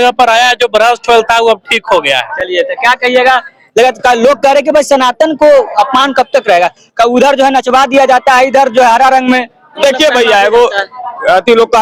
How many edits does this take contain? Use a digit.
0